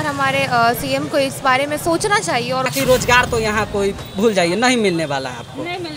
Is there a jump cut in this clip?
yes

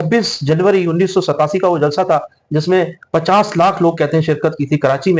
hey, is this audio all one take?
yes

